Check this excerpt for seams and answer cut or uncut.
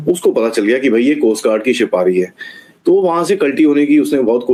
uncut